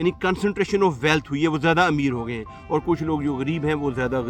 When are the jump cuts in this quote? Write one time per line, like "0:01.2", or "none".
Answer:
none